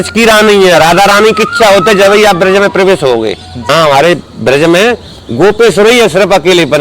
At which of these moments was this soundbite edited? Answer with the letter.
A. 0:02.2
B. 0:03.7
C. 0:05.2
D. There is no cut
B